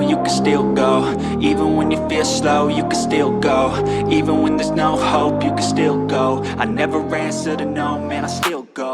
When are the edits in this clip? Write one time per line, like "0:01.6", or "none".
none